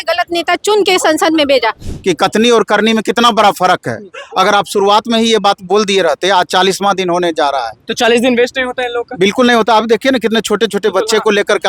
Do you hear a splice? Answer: yes; 1 cut; at 1.8 s

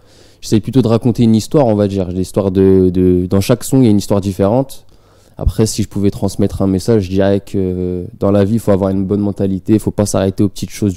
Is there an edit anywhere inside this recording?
no; 0 cuts

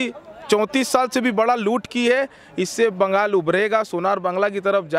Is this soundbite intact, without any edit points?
yes; 0 cuts

